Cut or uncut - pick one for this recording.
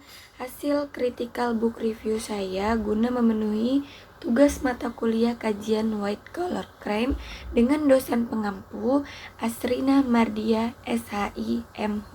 uncut